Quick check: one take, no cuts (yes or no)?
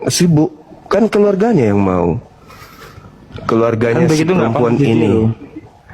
yes